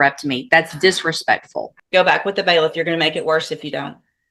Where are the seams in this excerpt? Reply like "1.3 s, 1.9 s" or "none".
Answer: 1.8 s